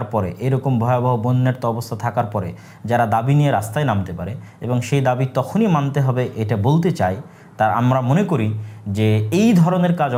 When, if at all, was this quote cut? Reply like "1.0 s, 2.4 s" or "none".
none